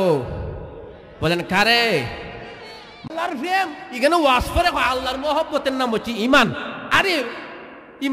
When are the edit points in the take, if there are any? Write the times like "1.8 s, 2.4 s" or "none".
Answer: 3.1 s